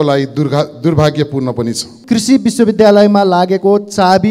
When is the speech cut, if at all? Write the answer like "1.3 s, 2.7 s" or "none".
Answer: 1.9 s